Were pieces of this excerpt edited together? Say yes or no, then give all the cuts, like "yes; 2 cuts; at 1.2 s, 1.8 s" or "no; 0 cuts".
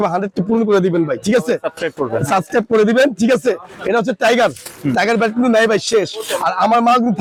no; 0 cuts